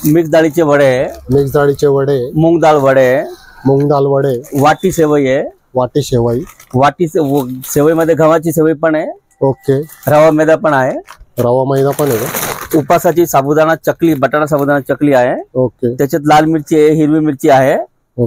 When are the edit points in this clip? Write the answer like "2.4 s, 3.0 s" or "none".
none